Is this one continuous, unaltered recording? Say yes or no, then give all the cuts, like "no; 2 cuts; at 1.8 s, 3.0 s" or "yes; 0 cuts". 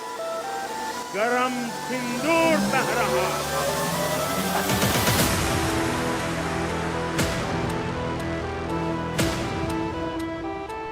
no; 1 cut; at 1.0 s